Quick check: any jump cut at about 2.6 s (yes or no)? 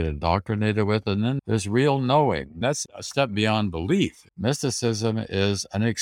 yes